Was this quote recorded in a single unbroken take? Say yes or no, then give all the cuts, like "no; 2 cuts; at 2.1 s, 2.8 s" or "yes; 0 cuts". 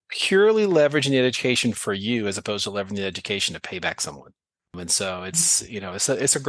no; 1 cut; at 4.8 s